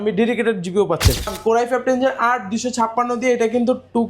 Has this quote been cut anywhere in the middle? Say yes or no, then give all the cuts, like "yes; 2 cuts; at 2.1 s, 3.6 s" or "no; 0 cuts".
yes; 1 cut; at 1.3 s